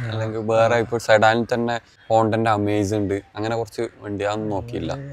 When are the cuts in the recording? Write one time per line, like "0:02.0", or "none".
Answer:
0:01.9